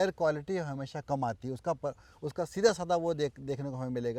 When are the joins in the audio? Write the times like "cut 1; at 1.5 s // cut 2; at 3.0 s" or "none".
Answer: none